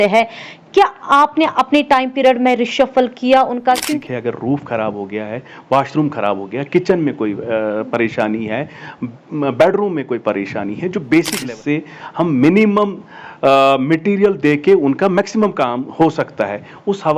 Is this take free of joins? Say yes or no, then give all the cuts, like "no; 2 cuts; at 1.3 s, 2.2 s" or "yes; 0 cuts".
no; 2 cuts; at 3.9 s, 11.5 s